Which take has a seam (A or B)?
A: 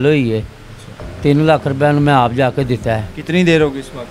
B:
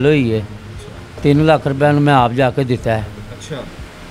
A